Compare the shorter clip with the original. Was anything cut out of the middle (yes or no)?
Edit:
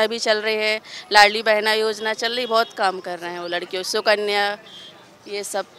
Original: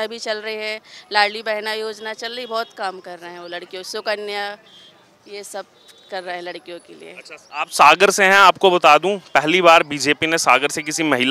no